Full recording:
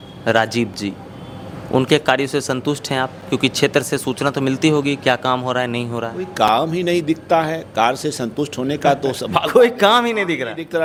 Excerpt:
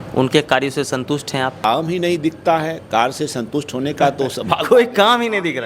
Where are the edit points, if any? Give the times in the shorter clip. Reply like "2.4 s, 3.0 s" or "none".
1.6 s